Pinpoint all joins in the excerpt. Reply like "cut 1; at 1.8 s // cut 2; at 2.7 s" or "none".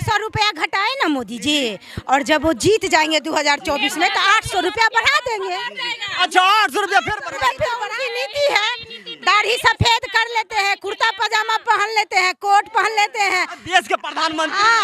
cut 1; at 7.9 s